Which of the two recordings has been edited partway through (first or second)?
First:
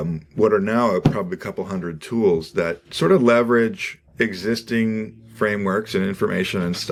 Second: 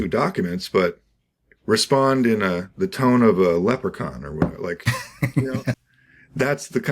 second